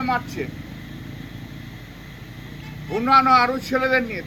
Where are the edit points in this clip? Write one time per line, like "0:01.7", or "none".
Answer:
none